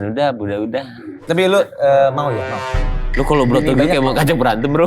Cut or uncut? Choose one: cut